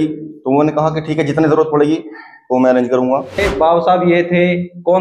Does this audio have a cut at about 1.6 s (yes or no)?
no